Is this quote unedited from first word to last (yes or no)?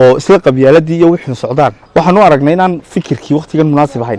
no